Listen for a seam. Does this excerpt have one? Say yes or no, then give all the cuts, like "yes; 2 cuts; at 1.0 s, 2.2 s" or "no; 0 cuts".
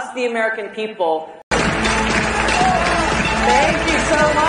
yes; 1 cut; at 1.4 s